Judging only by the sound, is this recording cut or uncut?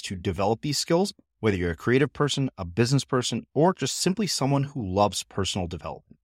uncut